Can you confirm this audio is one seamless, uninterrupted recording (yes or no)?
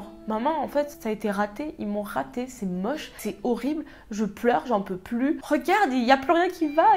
yes